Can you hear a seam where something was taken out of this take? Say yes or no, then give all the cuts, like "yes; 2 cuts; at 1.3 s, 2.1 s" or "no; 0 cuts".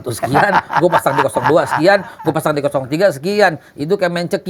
no; 0 cuts